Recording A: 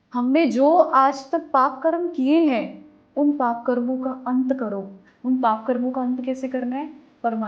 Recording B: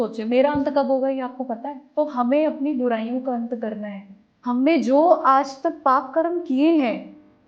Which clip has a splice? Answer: B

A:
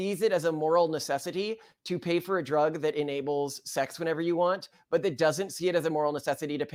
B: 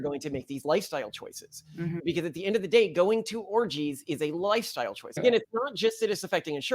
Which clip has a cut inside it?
B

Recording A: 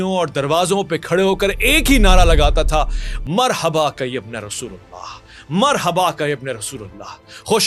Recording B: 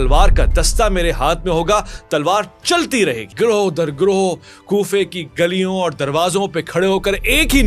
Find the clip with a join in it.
B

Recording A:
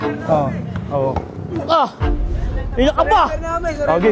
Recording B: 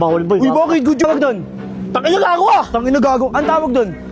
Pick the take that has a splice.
B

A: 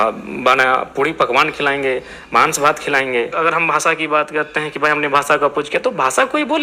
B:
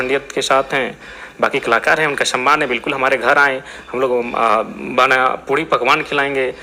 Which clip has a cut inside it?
A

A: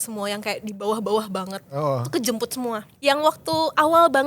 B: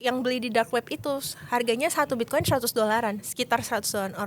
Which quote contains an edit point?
A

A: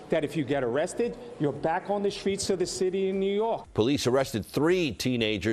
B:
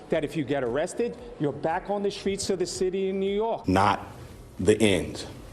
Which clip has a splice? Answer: B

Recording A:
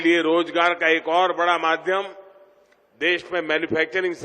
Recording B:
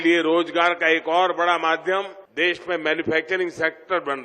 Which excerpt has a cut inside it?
B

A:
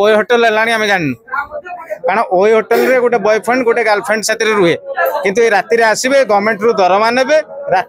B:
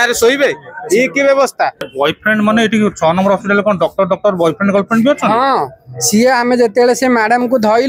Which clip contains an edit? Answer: B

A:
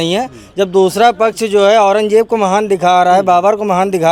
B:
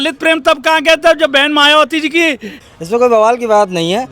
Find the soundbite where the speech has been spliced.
B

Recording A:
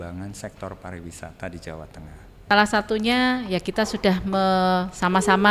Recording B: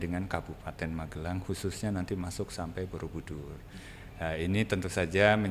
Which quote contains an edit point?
A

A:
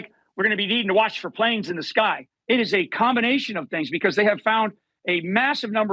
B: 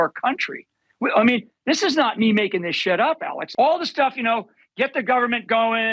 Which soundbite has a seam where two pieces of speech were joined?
B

